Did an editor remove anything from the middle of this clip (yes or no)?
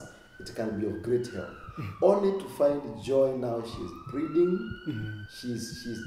yes